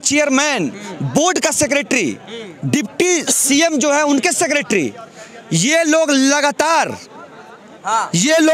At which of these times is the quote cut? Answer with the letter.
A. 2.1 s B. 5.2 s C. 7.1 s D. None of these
D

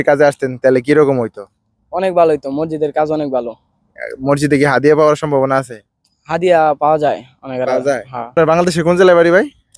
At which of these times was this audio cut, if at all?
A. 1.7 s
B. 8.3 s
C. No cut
B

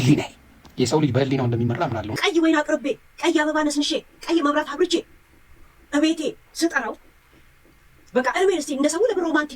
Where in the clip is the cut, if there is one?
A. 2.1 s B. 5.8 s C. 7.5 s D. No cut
A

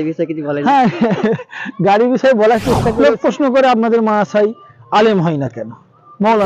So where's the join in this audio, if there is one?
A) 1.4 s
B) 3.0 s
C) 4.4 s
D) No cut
B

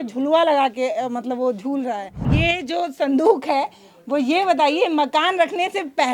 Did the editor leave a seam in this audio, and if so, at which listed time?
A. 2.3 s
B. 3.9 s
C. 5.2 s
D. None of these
A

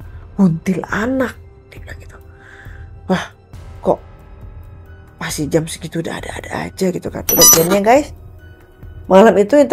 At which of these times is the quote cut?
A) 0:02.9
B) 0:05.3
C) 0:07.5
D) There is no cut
C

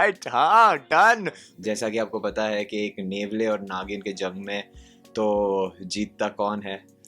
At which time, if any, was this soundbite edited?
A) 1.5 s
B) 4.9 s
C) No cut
A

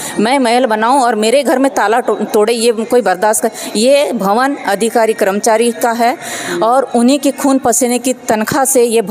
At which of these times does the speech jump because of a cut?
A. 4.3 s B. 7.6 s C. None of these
C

